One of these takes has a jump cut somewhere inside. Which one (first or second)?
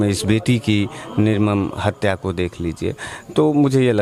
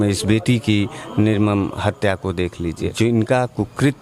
second